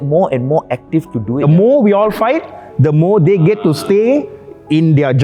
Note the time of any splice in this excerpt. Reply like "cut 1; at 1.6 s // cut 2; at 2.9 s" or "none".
cut 1; at 1.4 s